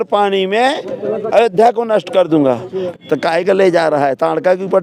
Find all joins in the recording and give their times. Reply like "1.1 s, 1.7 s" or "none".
2.9 s